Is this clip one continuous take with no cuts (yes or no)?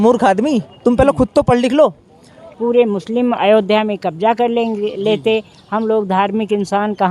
no